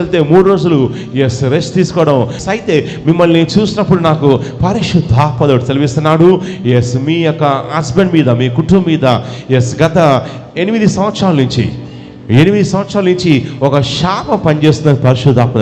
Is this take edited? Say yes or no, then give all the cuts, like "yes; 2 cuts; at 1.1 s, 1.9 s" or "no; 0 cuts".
yes; 1 cut; at 2.4 s